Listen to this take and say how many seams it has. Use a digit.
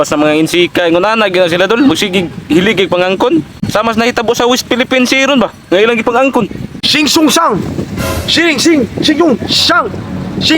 2